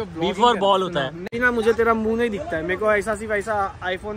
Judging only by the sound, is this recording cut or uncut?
cut